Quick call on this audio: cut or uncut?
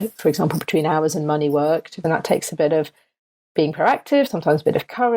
cut